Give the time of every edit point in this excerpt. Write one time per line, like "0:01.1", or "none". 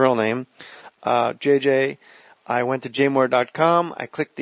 none

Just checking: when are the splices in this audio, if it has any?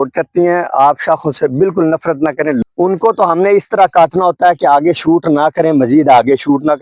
0:02.6

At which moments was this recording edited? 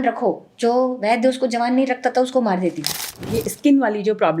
0:03.2

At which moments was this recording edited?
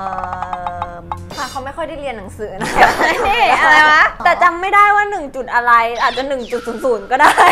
0:01.3
0:04.1

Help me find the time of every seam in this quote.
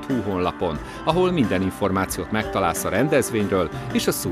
none

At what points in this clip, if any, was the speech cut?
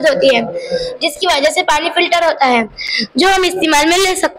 none

